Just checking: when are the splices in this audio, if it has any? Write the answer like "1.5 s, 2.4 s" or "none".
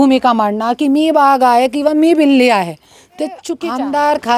3.5 s